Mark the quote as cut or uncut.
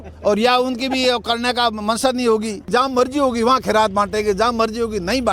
cut